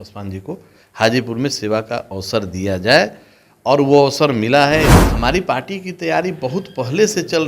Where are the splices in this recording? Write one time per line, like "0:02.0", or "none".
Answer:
0:05.0

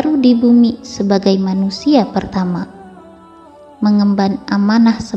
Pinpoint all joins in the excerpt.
none

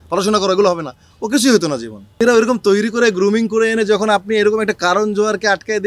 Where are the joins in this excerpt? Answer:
0:02.0

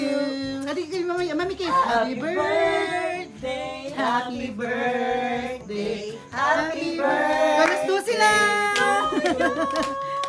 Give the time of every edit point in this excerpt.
none

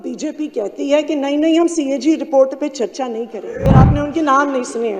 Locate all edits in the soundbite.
0:03.7

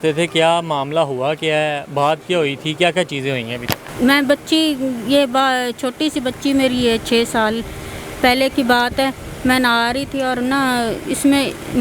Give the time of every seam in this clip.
none

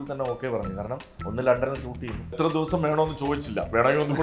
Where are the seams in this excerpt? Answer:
0:02.4

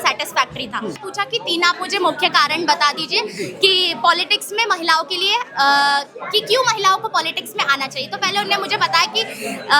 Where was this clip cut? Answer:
0:01.0

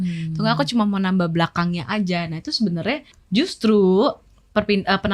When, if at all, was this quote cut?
0:03.1

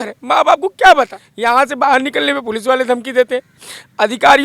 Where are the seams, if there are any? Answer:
0:01.2

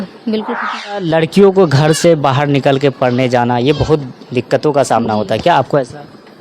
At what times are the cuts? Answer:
0:01.0

